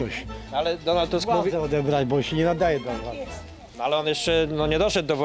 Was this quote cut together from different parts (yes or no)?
no